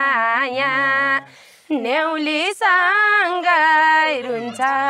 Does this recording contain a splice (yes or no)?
no